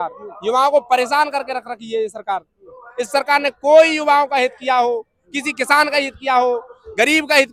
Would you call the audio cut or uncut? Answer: uncut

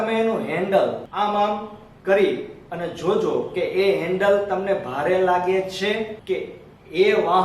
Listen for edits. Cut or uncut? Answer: cut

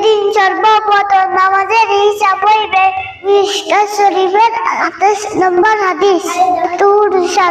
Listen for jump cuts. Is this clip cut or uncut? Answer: cut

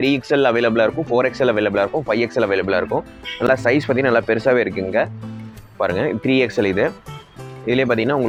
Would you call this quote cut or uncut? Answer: uncut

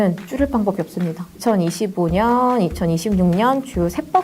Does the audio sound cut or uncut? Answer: cut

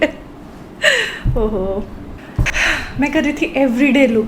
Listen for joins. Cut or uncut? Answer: cut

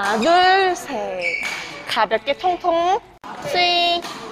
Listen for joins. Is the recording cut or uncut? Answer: cut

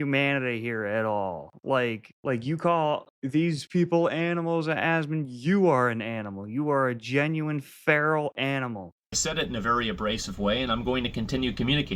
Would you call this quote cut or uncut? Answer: uncut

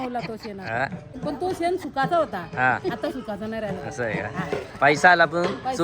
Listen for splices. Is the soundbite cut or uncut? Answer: cut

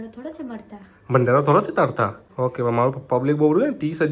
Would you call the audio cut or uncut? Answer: cut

